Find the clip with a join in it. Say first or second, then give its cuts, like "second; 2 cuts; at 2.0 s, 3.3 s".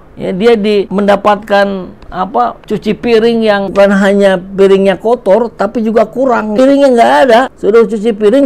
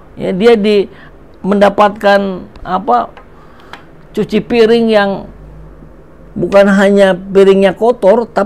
first; 5 cuts; at 0.9 s, 2.6 s, 3.7 s, 6.6 s, 7.5 s